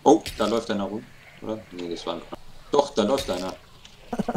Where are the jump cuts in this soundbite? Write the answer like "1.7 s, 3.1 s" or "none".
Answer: 2.3 s